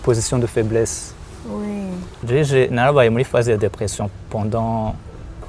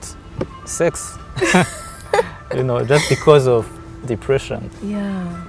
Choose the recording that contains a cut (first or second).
first